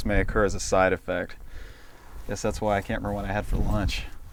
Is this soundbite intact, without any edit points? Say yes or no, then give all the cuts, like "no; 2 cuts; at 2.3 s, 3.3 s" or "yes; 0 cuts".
yes; 0 cuts